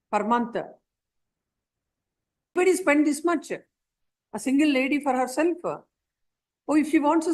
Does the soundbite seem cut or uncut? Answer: cut